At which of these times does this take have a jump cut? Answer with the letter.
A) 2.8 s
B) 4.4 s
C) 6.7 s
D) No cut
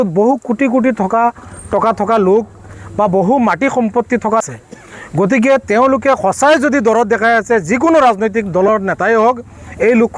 B